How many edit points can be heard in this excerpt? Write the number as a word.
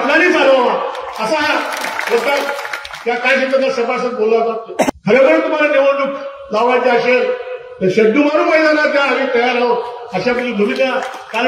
one